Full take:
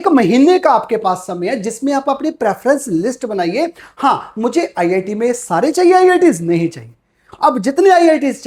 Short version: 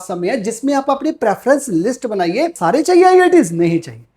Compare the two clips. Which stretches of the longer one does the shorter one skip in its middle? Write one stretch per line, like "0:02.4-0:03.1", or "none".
0:03.7-0:05.4